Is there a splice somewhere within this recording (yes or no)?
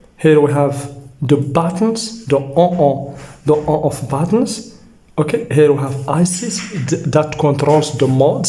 no